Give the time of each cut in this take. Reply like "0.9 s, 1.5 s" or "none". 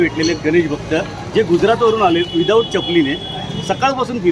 none